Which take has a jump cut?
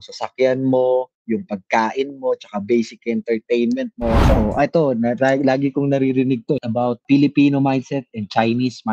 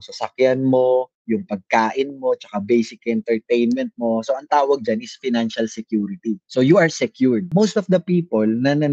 first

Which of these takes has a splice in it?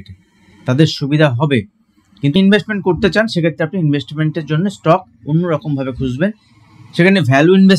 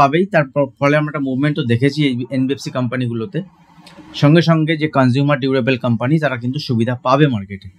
first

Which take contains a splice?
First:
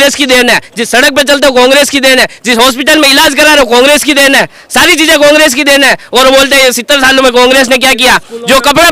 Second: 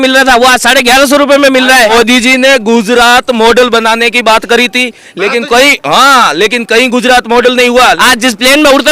second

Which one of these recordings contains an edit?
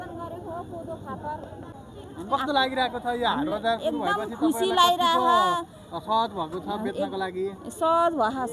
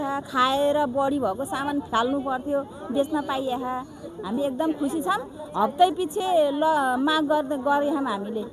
first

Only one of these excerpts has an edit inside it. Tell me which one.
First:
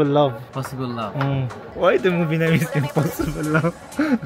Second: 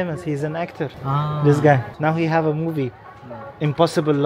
second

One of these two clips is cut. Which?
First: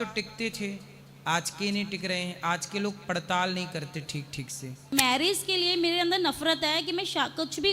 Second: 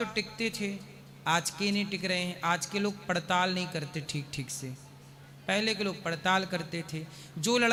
first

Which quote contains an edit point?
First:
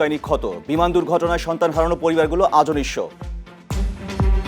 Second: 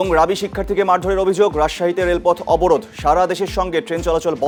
first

